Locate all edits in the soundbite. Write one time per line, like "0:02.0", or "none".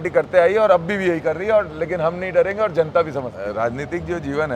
0:03.4